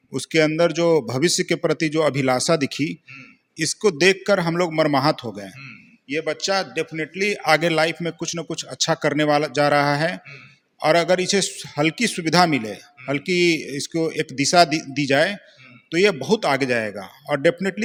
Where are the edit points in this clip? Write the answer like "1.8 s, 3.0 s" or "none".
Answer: none